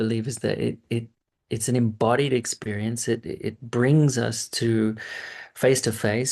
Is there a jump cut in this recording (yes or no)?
no